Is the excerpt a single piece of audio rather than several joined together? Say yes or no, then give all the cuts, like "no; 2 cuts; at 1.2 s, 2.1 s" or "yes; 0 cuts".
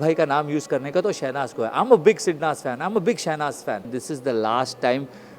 no; 1 cut; at 4.0 s